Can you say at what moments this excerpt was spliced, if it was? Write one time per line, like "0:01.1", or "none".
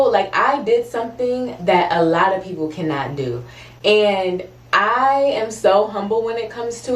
none